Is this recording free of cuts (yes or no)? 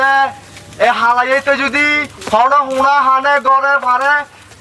yes